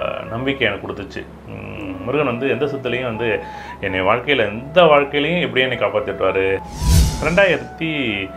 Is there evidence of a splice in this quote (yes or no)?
yes